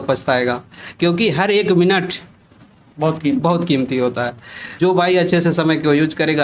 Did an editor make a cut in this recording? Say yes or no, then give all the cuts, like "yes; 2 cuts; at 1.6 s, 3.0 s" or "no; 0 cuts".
yes; 1 cut; at 4.7 s